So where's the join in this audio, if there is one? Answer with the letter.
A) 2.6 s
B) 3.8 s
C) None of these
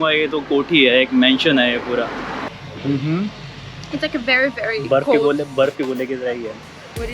A